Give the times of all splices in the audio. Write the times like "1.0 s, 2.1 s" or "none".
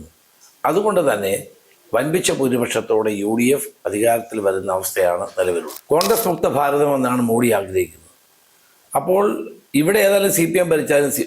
5.7 s